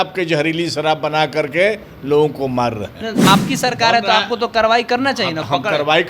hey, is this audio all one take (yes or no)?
no